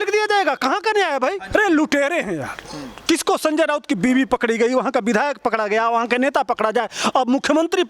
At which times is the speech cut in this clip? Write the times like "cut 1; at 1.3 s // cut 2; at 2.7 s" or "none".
cut 1; at 1.5 s